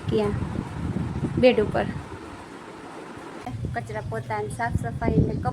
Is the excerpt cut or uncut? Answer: cut